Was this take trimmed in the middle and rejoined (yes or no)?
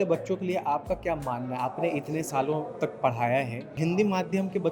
yes